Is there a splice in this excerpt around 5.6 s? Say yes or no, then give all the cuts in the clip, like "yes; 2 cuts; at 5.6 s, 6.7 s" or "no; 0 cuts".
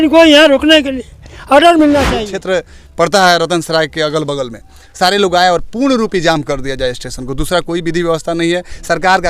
no; 1 cut; at 2.2 s